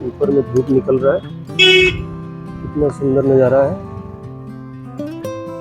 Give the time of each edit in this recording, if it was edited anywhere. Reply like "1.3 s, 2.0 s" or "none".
4.3 s

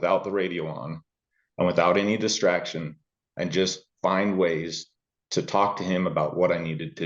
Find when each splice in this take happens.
none

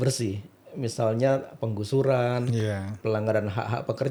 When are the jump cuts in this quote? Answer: none

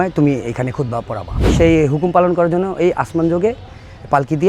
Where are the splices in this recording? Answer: 1.5 s

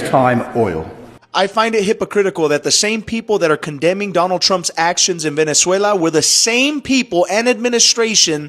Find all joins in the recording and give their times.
1.2 s

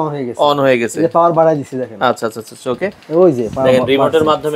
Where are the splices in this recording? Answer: none

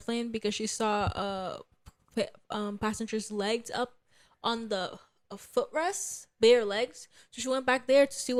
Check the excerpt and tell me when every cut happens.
none

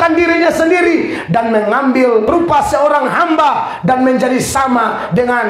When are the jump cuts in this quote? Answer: 2.3 s

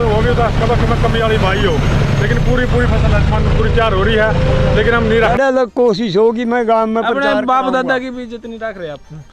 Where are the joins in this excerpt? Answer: 5.3 s

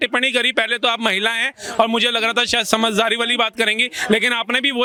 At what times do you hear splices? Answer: none

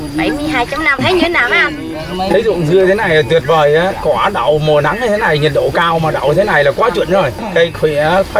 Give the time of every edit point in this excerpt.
1.0 s, 7.4 s

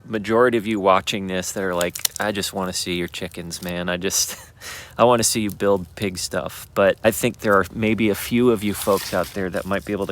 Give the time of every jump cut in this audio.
7.0 s

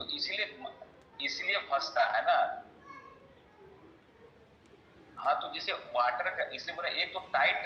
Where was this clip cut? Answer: none

